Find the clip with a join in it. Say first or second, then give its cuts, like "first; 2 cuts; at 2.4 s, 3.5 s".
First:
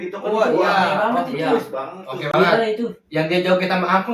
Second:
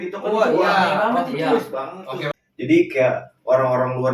second; 1 cut; at 2.3 s